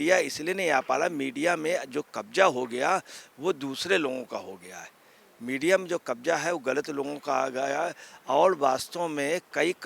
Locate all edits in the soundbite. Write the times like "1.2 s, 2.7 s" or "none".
none